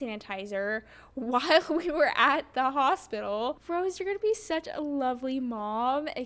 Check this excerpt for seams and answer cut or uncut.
cut